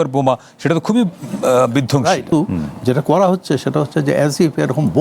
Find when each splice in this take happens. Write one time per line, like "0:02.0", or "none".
0:02.3